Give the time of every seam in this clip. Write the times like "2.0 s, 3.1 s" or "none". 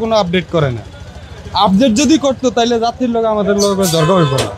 none